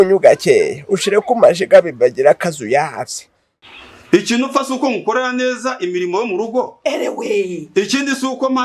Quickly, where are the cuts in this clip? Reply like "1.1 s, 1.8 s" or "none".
3.6 s